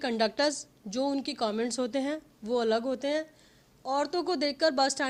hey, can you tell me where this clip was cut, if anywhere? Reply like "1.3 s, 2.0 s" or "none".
none